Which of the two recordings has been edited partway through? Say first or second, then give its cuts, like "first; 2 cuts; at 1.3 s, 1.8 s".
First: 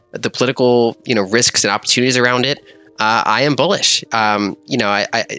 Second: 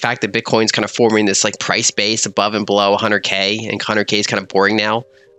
first; 1 cut; at 1.0 s